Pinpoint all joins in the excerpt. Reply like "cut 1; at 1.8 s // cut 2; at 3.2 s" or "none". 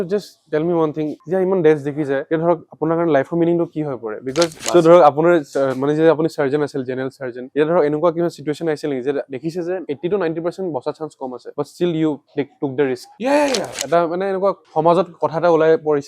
cut 1; at 4.6 s // cut 2; at 13.8 s